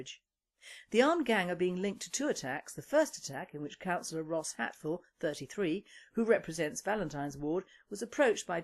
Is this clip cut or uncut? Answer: cut